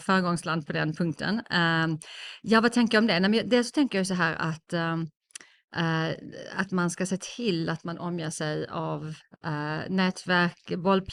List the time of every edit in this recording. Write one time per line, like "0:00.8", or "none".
none